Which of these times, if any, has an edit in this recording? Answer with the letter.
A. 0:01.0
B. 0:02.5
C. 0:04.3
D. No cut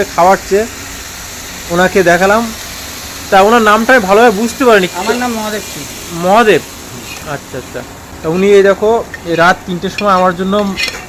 D